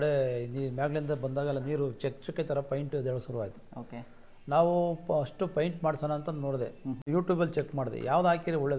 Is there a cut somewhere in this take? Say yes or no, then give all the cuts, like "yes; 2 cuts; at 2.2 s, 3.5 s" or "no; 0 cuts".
yes; 1 cut; at 7.0 s